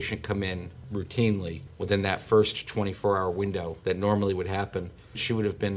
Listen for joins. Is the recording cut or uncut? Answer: uncut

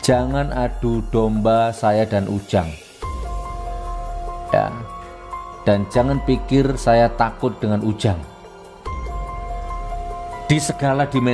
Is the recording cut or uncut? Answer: cut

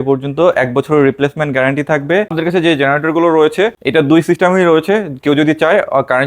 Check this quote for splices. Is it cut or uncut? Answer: cut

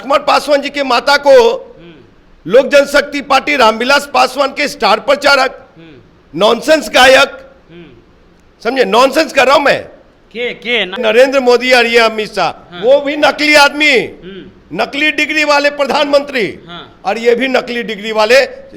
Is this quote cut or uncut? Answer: cut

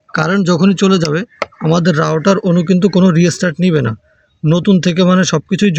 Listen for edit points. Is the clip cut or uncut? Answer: uncut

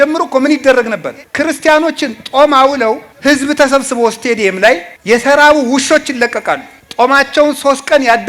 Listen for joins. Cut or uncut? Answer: cut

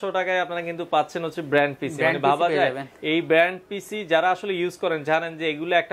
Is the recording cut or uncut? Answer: uncut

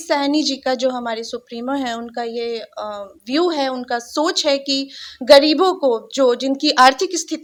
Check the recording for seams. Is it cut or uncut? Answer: uncut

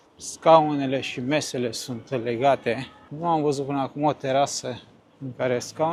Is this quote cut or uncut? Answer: uncut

